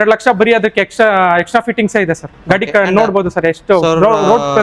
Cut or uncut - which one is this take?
uncut